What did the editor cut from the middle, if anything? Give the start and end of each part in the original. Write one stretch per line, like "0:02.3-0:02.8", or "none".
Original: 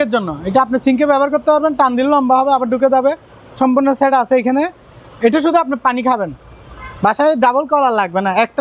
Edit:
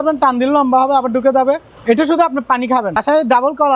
0:03.3-0:05.1
0:06.4-0:07.1